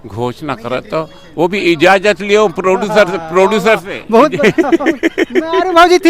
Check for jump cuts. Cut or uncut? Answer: uncut